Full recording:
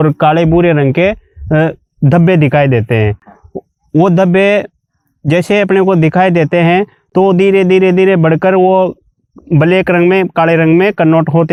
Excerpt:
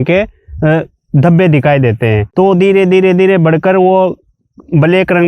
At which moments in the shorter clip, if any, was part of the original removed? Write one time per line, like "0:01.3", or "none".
0:02.2